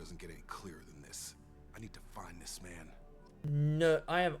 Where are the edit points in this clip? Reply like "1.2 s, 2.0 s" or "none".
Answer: 3.3 s